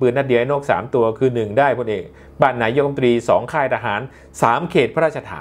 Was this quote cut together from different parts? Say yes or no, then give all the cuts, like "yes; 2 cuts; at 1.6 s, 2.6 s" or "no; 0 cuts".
no; 0 cuts